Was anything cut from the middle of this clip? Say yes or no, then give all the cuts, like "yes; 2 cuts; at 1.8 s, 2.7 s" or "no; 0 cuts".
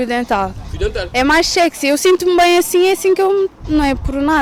no; 0 cuts